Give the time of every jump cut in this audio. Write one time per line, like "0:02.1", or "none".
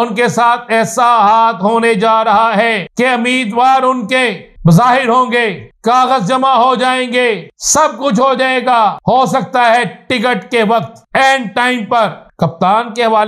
0:02.8
0:04.5
0:05.6
0:07.5
0:09.0
0:11.0
0:12.2